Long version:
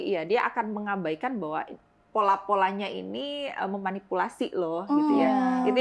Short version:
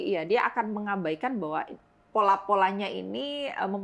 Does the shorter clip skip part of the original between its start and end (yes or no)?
no